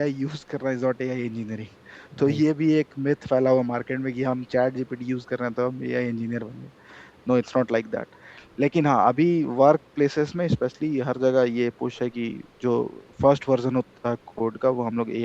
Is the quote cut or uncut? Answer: uncut